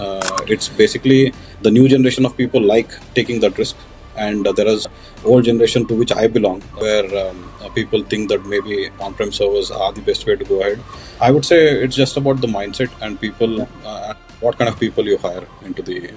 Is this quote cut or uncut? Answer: cut